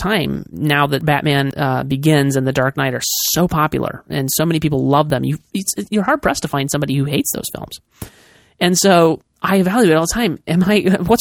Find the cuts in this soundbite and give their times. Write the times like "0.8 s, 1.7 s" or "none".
1.2 s, 5.1 s